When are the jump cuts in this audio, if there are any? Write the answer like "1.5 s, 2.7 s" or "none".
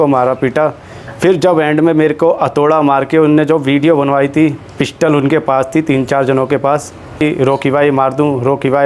7.2 s